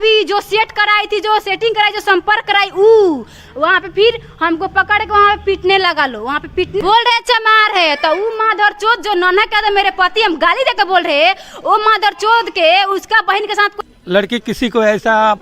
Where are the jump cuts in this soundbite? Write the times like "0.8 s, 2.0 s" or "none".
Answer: 6.8 s, 13.7 s